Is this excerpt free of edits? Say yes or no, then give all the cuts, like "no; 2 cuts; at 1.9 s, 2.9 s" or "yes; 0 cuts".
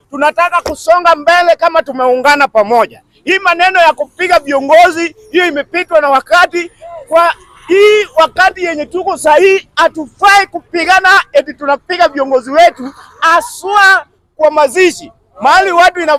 yes; 0 cuts